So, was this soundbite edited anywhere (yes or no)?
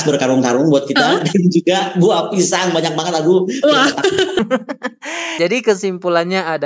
no